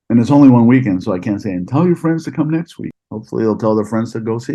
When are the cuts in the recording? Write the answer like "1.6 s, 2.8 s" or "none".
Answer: 2.8 s